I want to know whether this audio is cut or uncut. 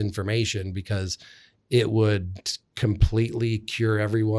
uncut